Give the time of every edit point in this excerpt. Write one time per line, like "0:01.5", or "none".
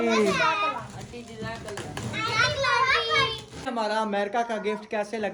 0:03.7